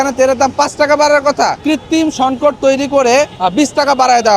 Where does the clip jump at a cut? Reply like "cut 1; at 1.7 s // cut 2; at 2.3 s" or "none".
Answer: cut 1; at 1.6 s // cut 2; at 3.3 s